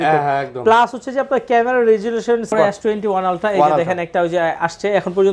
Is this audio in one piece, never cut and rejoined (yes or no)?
no